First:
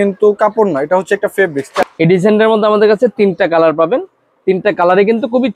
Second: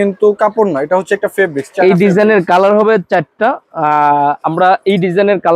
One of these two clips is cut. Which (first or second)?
first